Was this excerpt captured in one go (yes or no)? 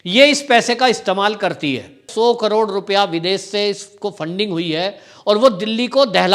no